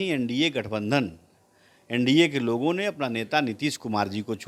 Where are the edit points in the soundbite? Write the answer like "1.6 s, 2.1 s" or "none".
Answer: none